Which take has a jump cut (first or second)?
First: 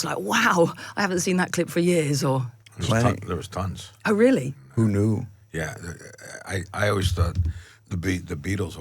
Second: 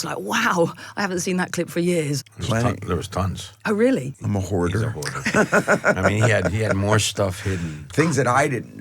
second